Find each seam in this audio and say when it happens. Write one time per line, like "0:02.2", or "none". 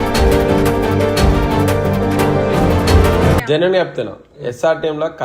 0:03.4